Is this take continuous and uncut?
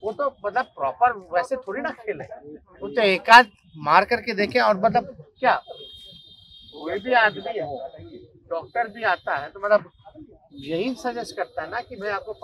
yes; 0 cuts

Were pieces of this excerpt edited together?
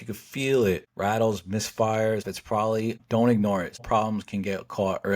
yes; 3 cuts; at 0.9 s, 2.5 s, 3.8 s

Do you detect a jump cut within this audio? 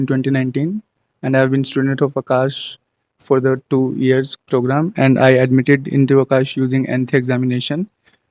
no; 0 cuts

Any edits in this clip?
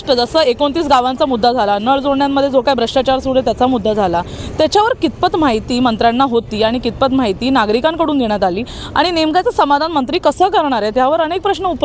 no; 0 cuts

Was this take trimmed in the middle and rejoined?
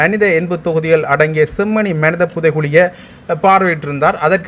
no; 0 cuts

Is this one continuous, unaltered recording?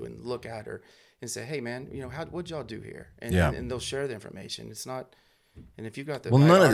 yes; 0 cuts

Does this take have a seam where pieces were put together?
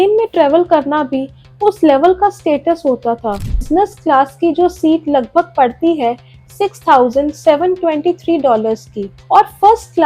yes; 1 cut; at 3.7 s

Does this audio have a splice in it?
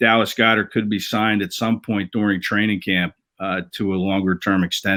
no; 0 cuts

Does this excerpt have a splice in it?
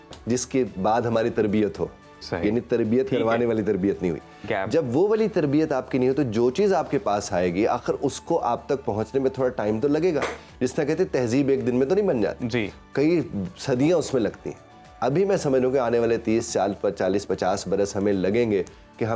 no; 0 cuts

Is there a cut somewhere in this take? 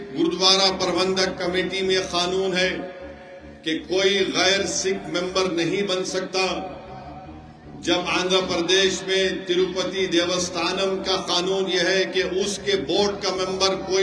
no; 0 cuts

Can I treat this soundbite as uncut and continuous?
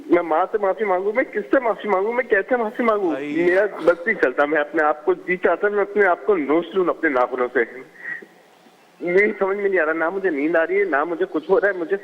no; 1 cut; at 3.2 s

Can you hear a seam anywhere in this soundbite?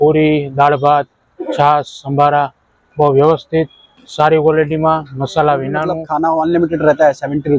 yes; 1 cut; at 6.0 s

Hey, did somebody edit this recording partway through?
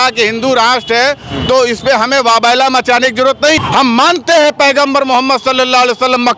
yes; 1 cut; at 3.6 s

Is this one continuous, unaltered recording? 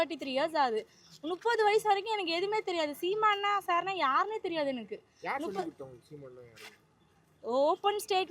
yes; 0 cuts

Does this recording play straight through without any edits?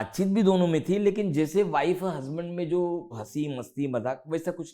no; 1 cut; at 3.2 s

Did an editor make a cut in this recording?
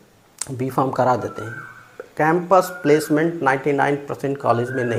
no; 0 cuts

